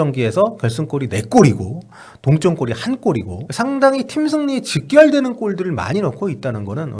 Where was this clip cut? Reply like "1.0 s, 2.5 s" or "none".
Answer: 3.4 s